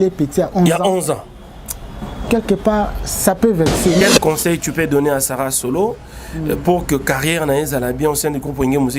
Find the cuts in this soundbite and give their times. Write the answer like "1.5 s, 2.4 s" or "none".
4.0 s